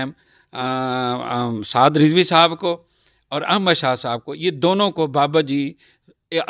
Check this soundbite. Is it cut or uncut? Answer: uncut